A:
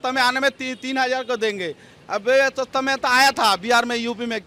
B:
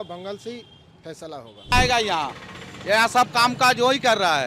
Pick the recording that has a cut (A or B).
B